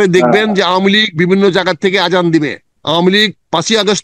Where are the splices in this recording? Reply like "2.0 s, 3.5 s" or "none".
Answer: 2.7 s